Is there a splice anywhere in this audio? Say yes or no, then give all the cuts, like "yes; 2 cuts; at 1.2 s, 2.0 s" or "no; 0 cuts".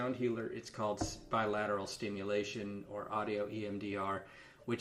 no; 0 cuts